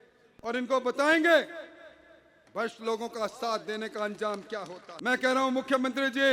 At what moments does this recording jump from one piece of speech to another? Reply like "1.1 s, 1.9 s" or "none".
4.8 s